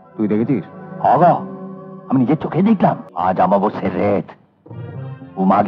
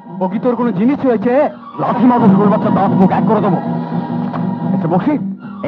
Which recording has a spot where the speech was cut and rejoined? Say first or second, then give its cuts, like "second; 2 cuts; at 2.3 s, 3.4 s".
first; 1 cut; at 3.1 s